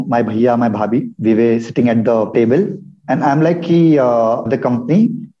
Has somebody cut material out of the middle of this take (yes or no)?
yes